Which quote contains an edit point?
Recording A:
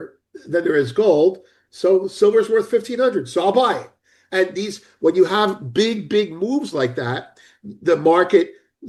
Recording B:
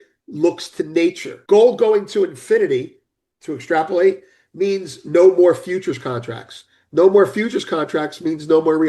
B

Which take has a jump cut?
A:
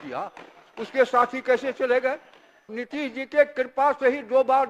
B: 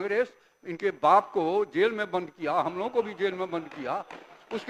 A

